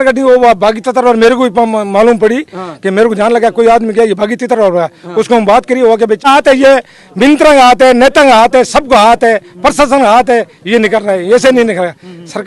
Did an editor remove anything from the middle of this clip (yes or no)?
yes